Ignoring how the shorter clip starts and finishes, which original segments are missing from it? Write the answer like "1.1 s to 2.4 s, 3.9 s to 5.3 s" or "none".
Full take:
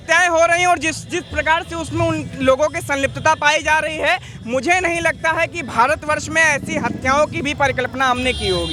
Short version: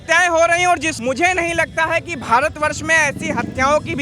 0.9 s to 4.4 s